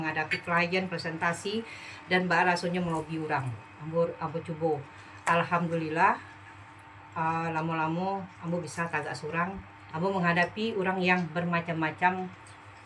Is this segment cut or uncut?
cut